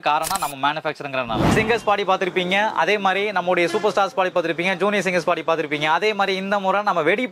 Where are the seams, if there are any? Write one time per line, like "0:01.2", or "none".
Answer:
0:01.5